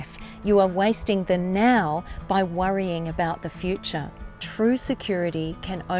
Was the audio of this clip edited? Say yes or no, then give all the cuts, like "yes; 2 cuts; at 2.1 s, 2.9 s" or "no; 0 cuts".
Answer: yes; 1 cut; at 4.4 s